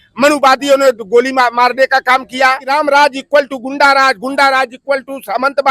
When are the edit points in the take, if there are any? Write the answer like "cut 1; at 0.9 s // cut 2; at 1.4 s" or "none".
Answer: cut 1; at 2.6 s